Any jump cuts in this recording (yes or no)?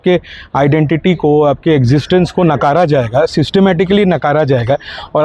no